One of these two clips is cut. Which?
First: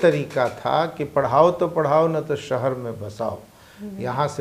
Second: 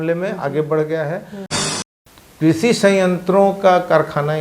second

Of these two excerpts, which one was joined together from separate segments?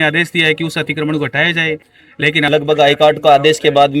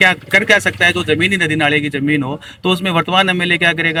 first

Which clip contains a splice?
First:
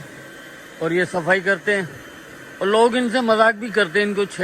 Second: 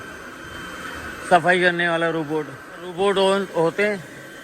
second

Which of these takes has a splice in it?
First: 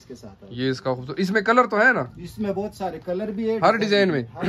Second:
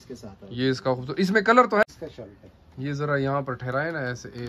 second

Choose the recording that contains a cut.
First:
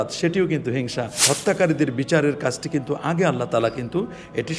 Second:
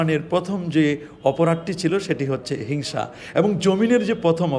first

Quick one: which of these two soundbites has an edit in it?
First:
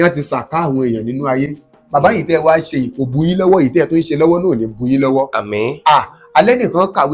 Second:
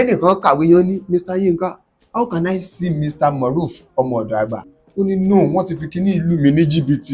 second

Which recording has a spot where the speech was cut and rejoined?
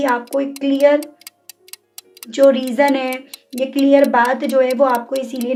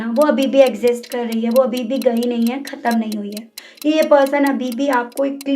second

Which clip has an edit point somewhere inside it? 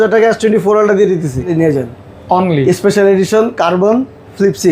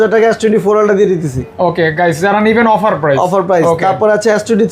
first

